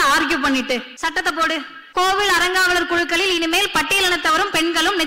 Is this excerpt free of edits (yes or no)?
no